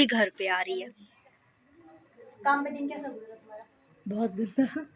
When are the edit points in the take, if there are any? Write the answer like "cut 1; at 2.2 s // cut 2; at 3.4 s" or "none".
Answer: cut 1; at 1.0 s